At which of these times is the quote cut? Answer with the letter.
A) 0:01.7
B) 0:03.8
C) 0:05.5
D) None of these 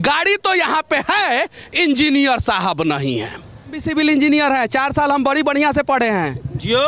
B